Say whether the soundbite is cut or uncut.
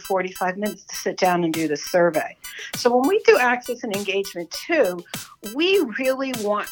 uncut